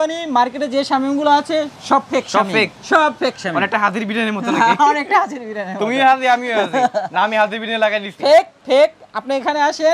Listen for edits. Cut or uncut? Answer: uncut